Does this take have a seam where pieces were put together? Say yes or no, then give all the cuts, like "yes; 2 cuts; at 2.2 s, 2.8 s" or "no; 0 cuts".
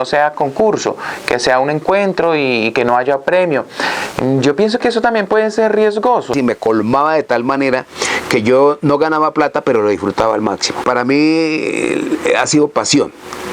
yes; 2 cuts; at 6.3 s, 10.8 s